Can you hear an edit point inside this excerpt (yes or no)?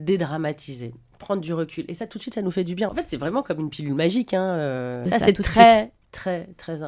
yes